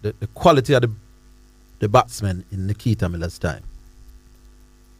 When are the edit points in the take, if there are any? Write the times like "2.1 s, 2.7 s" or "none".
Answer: none